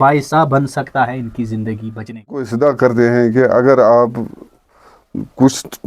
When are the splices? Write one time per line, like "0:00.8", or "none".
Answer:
0:02.5